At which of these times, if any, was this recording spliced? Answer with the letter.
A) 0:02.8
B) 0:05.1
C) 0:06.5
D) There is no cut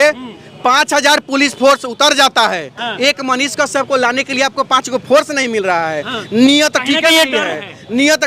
A